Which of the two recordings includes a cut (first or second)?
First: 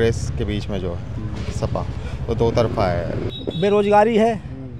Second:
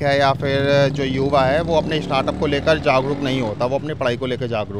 first